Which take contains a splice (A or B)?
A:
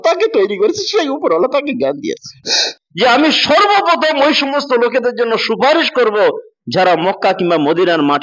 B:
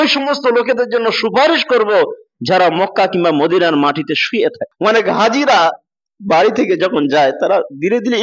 A